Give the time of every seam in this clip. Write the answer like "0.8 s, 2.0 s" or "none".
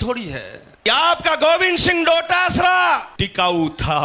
0.9 s, 3.1 s